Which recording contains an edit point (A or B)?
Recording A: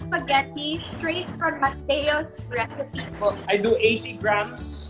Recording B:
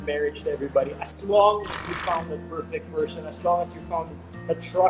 A